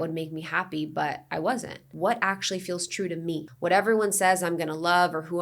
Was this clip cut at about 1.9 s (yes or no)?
yes